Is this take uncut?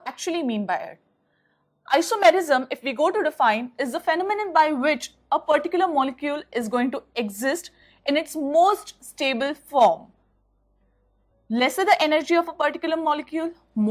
yes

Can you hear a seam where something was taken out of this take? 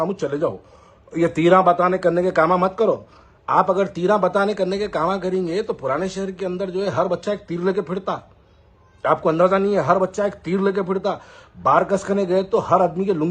no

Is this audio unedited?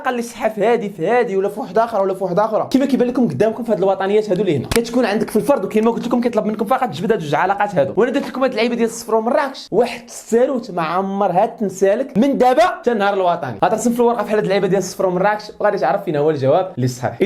yes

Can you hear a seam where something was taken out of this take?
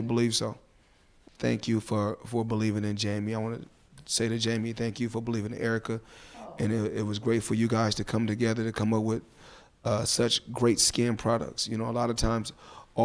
yes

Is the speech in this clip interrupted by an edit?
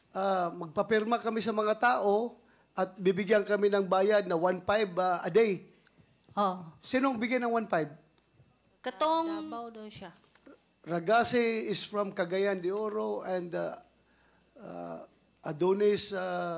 yes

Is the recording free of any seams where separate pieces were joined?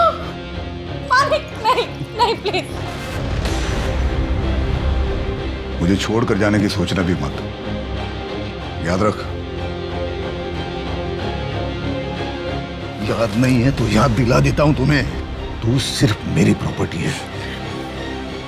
yes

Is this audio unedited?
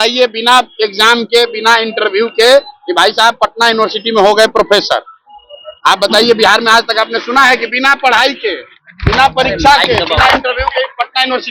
yes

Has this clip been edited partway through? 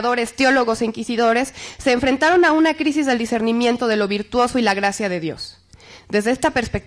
no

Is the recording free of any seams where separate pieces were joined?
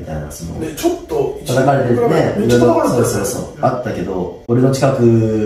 no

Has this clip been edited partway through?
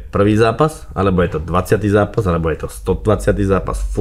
no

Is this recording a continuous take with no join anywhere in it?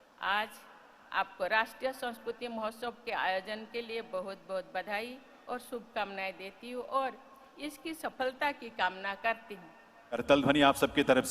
no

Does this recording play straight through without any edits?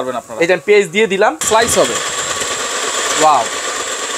no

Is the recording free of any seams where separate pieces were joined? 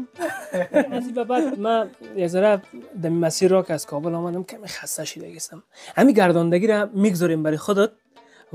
no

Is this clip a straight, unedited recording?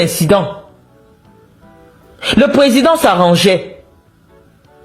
yes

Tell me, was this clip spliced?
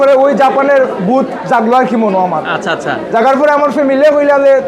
no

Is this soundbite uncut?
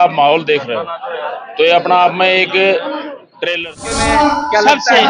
no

